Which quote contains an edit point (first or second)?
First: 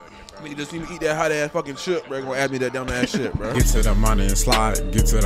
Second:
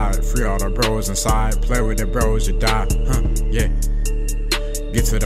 first